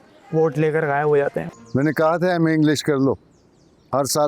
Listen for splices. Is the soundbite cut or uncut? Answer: cut